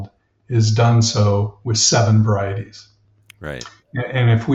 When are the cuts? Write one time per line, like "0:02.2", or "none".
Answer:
none